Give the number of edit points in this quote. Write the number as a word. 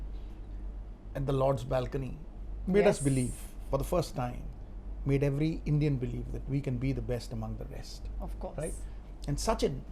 zero